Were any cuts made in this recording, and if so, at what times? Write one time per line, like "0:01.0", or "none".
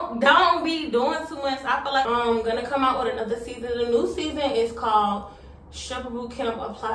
0:02.1